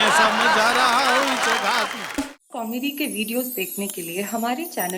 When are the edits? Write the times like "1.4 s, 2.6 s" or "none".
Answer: 2.2 s